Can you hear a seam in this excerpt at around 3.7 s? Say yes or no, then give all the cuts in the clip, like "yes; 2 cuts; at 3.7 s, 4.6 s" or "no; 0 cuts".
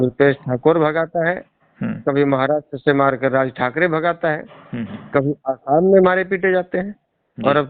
no; 0 cuts